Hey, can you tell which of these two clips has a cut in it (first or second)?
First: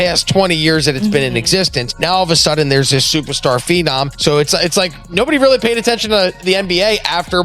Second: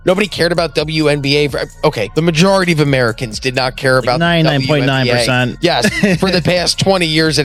first